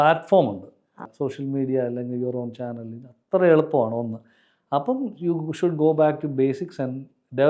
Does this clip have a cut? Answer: yes; 1 cut; at 1.0 s

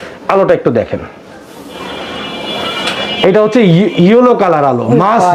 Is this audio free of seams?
yes; 0 cuts

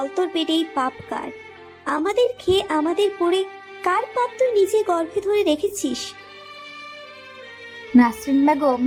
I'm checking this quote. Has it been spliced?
no; 0 cuts

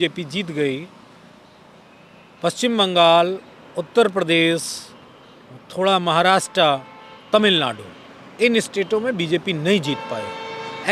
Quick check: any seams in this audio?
no; 0 cuts

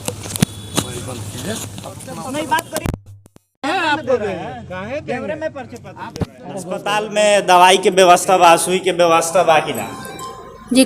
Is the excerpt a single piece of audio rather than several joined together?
no; 2 cuts; at 2.0 s, 7.0 s

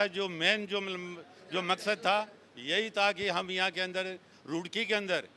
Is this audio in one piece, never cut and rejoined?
yes; 0 cuts

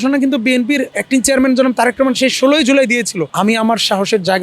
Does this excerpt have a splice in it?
yes; 2 cuts; at 0.9 s, 3.2 s

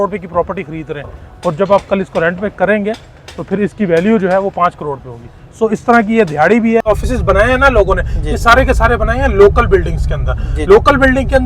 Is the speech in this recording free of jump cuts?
no; 1 cut; at 6.9 s

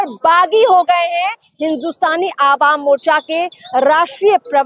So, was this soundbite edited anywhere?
no; 0 cuts

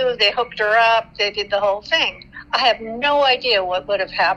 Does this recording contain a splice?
no; 0 cuts

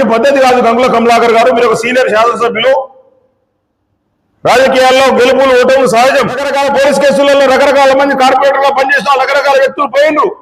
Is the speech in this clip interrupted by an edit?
yes; 1 cut; at 6.4 s

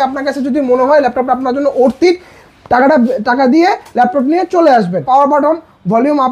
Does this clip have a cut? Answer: yes; 1 cut; at 5.0 s

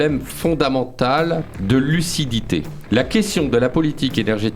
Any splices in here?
yes; 1 cut; at 2.7 s

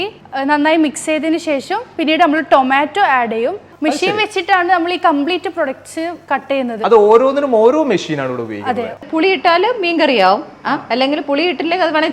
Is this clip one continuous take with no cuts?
no; 2 cuts; at 3.7 s, 9.0 s

